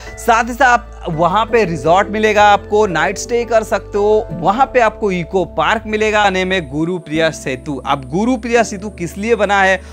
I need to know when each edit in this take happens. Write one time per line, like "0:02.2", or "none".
0:06.2